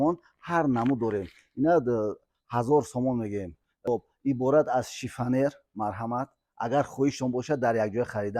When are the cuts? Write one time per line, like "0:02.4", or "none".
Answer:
0:03.9